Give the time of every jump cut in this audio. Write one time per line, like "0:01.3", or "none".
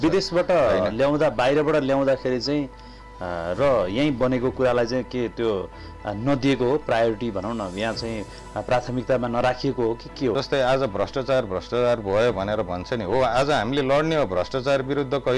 0:10.4